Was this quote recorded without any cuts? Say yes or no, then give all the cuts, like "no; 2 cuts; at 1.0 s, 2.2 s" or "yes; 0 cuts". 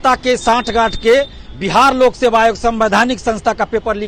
yes; 0 cuts